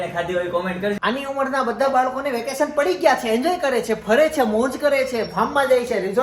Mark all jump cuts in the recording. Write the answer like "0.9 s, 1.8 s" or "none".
1.0 s